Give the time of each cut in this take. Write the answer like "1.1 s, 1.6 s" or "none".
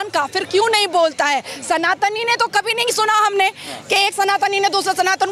none